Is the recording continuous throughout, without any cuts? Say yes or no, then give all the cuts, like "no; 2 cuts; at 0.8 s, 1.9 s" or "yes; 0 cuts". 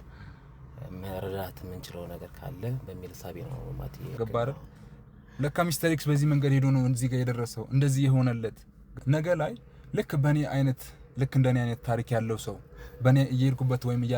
no; 2 cuts; at 4.1 s, 8.9 s